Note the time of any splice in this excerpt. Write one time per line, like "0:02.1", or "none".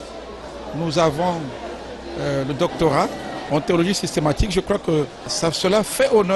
0:03.3
0:05.3